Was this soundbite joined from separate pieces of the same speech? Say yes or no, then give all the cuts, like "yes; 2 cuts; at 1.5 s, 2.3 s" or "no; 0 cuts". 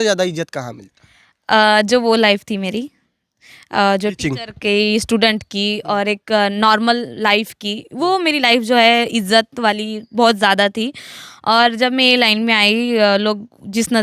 no; 0 cuts